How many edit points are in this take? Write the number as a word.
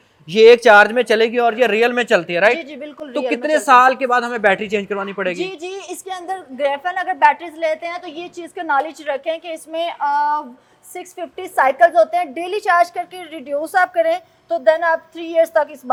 zero